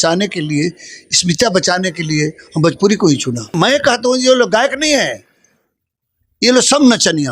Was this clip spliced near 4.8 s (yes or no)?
no